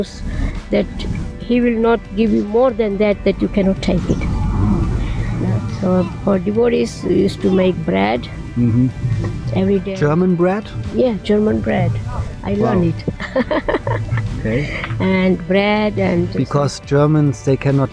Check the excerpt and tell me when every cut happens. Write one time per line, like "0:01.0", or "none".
0:05.2